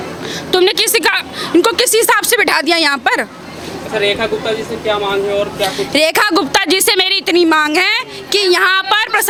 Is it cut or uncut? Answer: uncut